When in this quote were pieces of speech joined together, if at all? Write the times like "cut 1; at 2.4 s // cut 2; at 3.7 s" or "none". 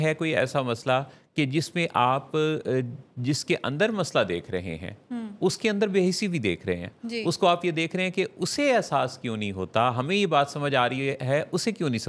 none